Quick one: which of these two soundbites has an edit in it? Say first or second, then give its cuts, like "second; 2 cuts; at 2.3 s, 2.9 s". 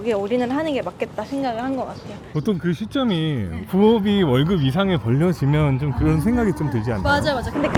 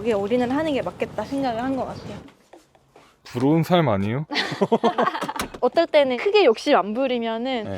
second; 1 cut; at 2.1 s